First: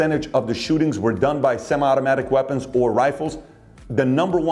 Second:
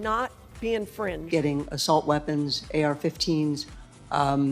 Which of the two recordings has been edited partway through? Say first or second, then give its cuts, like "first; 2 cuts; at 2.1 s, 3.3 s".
second; 1 cut; at 1.3 s